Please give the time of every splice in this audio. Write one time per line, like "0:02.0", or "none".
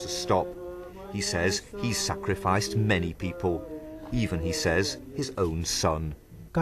0:01.0